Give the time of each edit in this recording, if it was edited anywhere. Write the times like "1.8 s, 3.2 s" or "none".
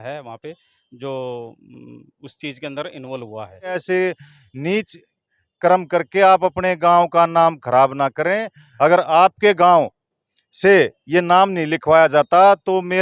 3.8 s, 8.6 s